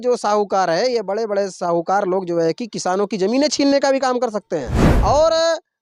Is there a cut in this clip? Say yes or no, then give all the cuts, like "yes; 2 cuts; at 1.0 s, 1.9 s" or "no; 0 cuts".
yes; 1 cut; at 4.9 s